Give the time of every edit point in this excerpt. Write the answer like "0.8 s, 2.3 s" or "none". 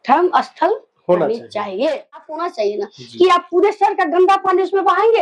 2.3 s